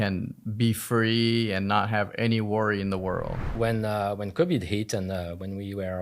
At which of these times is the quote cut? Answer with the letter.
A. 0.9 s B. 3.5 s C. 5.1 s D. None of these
B